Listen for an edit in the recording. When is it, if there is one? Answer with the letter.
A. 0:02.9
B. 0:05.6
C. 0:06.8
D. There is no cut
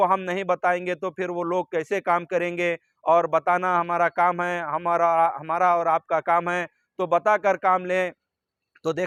D